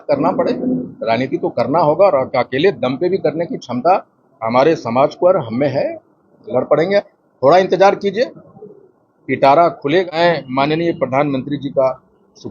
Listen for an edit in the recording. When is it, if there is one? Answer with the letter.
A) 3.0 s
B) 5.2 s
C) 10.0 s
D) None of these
C